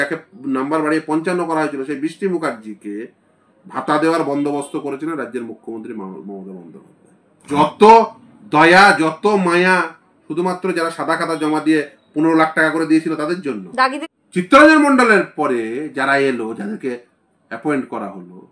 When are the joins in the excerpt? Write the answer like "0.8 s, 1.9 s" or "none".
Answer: 7.5 s, 14.1 s